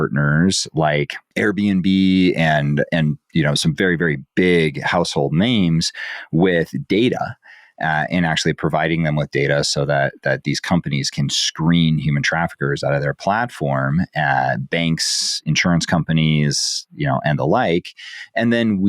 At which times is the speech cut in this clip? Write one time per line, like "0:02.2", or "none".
0:01.2